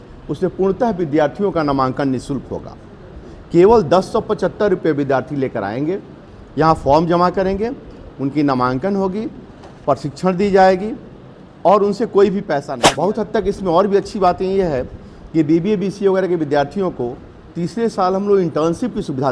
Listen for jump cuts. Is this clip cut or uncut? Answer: cut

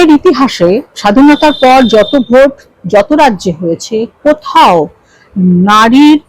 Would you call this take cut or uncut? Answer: cut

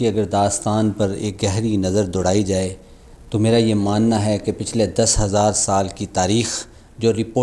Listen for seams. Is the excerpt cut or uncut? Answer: uncut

